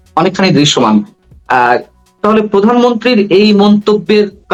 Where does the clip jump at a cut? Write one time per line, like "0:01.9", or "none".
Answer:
none